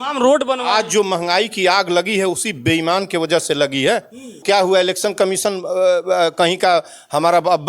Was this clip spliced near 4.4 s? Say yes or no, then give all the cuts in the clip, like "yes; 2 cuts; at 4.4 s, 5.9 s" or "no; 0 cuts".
yes; 1 cut; at 4.4 s